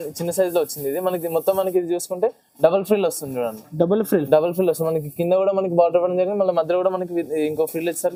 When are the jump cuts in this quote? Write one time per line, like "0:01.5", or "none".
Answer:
none